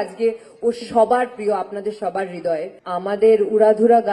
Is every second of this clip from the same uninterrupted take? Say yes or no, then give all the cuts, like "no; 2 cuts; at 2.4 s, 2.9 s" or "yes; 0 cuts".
no; 1 cut; at 2.8 s